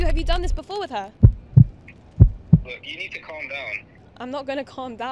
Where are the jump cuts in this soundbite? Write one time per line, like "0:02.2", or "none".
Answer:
none